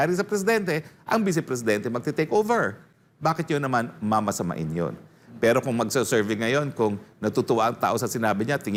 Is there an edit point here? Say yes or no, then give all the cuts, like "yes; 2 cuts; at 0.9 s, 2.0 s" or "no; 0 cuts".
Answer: no; 0 cuts